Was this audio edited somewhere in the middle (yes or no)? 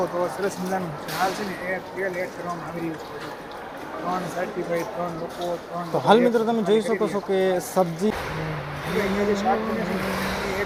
no